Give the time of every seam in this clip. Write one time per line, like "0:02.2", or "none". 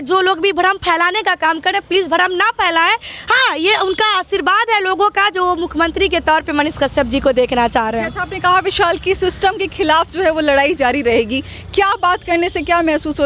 none